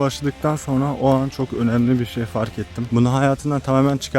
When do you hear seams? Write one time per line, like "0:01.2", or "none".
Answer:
0:02.9